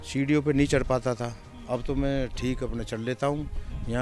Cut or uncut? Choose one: uncut